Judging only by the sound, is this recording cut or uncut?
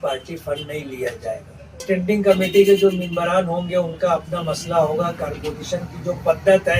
cut